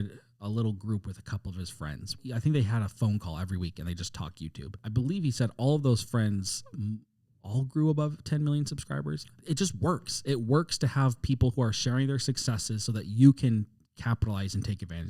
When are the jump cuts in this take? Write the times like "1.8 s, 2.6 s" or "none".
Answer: 2.2 s, 4.8 s